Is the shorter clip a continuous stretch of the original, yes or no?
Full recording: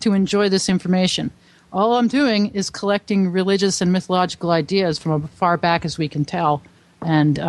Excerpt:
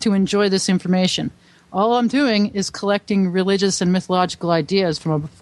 yes